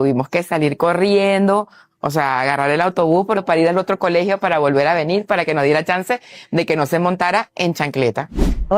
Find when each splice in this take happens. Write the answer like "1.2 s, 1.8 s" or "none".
6.4 s